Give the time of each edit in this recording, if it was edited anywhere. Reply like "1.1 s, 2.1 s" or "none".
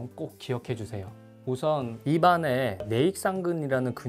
1.3 s